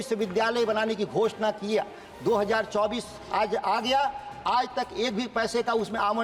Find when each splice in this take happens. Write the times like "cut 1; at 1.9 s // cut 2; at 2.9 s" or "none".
none